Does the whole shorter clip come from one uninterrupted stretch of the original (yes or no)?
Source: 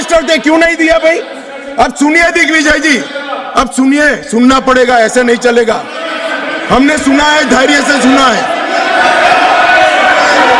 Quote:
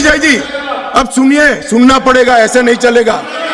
yes